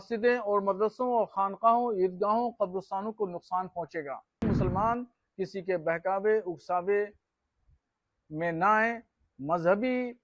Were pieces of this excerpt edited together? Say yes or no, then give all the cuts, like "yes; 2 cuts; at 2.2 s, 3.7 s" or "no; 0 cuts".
yes; 1 cut; at 4.4 s